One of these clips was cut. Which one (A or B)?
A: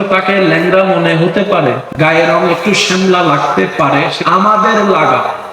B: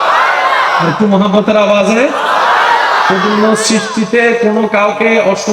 A